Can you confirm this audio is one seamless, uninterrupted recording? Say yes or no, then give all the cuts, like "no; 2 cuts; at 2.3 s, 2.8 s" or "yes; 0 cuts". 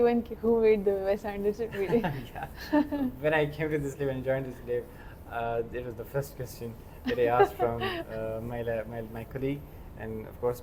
yes; 0 cuts